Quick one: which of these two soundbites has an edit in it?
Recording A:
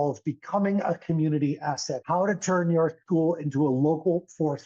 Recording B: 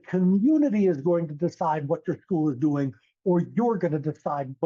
A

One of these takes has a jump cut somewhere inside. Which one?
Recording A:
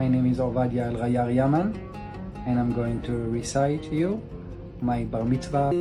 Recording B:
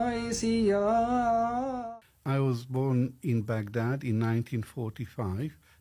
B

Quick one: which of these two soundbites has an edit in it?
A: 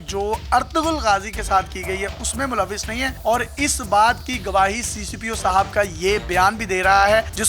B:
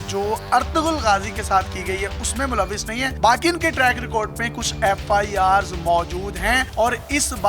A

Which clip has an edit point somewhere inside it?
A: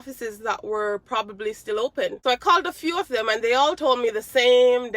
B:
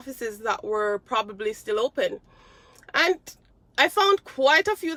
A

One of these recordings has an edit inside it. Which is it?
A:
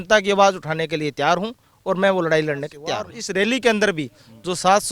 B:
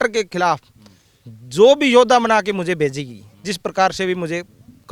A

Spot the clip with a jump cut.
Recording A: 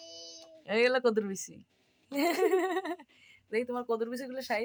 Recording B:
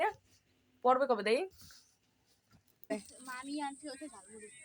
B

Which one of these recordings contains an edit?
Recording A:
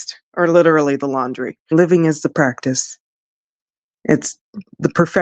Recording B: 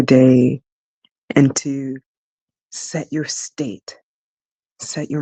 A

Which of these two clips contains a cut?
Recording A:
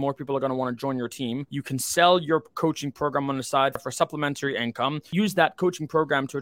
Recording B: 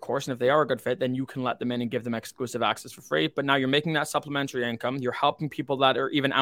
A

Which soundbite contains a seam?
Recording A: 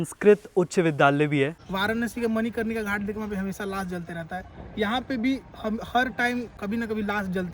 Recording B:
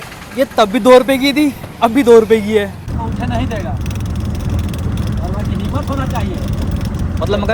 A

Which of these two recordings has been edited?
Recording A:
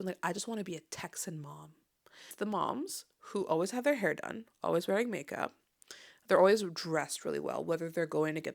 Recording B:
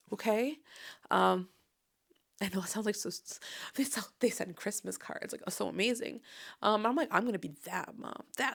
A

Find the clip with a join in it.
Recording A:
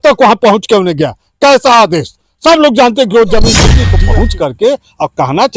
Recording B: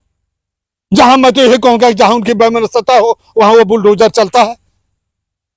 A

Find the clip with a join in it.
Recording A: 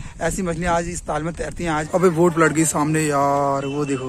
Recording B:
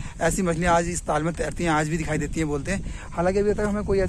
A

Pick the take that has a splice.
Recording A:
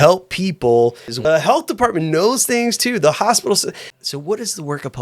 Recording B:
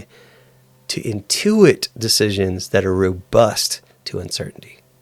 A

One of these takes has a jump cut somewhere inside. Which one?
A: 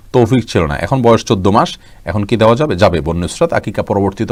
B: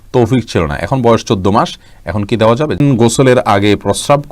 B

